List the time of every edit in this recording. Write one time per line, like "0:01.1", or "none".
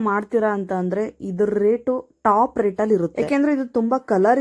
none